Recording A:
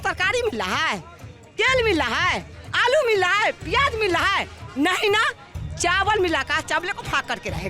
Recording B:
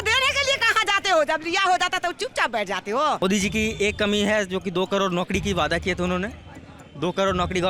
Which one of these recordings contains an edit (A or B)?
B